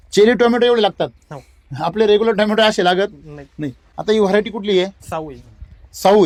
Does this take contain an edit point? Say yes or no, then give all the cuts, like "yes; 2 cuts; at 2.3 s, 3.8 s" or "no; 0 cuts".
no; 0 cuts